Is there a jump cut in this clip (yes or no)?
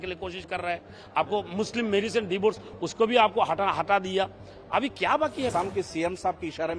yes